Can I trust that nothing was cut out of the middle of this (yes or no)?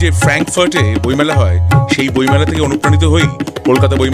yes